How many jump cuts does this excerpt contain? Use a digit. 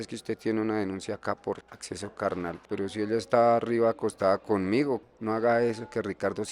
3